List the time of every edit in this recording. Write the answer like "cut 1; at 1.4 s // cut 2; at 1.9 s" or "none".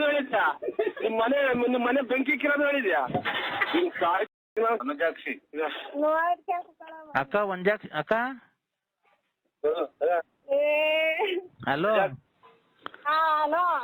cut 1; at 4.8 s